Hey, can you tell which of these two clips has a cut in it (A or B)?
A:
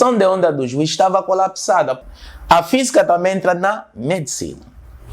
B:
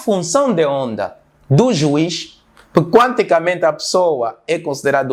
A